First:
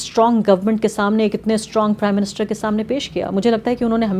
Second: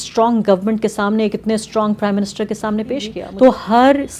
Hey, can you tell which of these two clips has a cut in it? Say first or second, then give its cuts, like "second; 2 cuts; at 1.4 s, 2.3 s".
second; 1 cut; at 3.2 s